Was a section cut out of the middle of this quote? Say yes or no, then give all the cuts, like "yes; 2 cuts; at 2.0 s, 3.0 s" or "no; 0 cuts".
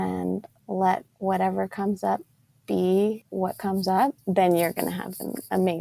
yes; 3 cuts; at 1.1 s, 3.2 s, 4.2 s